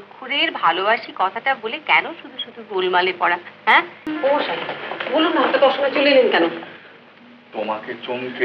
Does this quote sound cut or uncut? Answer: cut